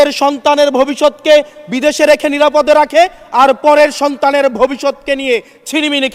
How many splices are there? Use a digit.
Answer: 0